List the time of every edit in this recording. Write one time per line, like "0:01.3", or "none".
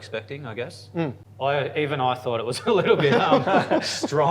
0:01.2

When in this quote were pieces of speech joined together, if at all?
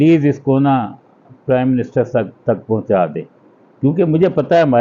none

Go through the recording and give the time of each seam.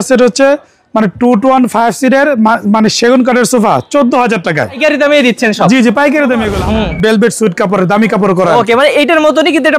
0:04.8
0:06.6

